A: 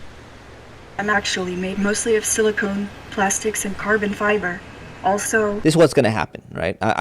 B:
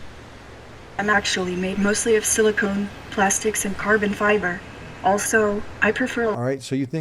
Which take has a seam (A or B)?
A